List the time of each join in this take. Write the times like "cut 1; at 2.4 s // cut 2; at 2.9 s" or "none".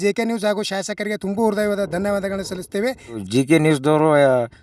cut 1; at 3.2 s